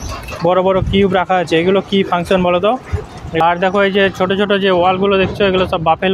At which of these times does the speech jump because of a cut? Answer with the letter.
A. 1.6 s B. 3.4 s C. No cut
B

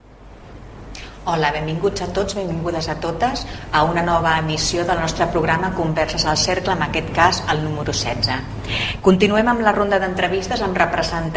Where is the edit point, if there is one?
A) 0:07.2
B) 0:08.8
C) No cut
C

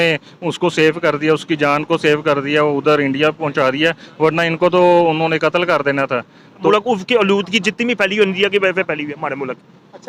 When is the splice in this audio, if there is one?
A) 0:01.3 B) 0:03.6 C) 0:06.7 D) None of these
C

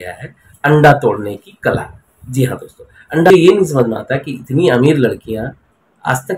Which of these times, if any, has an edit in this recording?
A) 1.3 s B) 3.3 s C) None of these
B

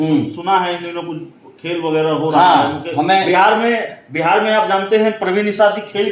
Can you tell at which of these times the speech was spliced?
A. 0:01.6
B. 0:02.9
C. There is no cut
C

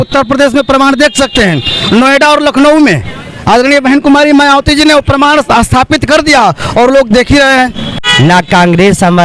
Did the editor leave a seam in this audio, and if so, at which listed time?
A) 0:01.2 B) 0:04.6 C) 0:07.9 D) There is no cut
C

